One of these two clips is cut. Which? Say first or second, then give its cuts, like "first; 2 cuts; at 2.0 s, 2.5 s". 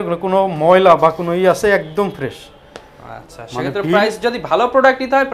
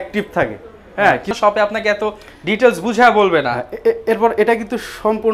second; 1 cut; at 1.4 s